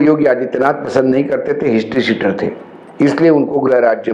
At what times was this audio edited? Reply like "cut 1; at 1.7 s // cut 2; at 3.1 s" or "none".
none